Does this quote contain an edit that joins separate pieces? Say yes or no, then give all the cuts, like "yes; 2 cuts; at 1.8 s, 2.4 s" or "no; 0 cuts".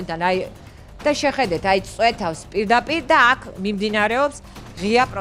no; 0 cuts